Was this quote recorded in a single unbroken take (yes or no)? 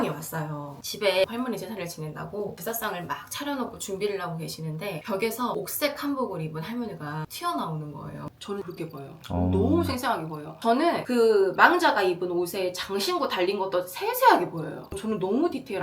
no